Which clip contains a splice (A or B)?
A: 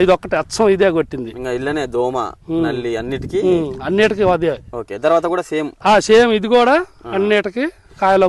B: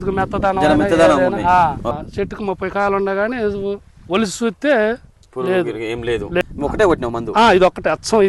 B